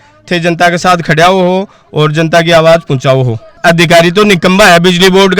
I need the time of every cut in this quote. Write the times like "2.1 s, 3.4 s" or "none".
3.6 s